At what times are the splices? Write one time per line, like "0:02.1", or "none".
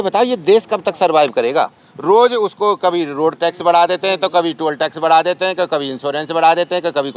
0:01.8